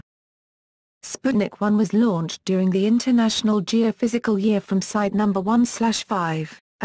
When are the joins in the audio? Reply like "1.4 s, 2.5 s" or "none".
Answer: 5.9 s